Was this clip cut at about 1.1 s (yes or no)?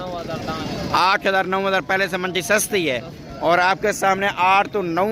no